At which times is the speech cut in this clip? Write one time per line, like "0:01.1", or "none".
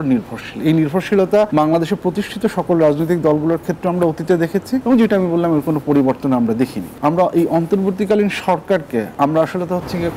0:01.5
0:04.8
0:06.9
0:09.1